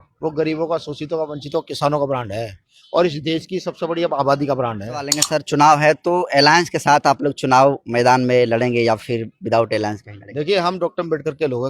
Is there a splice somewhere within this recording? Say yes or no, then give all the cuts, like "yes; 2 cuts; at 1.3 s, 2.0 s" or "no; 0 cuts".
yes; 1 cut; at 5.2 s